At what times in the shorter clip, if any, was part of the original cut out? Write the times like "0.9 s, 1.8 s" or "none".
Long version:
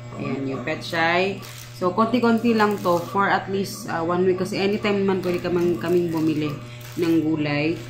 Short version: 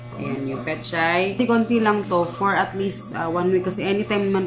1.4 s